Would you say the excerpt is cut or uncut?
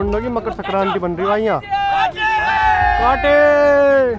uncut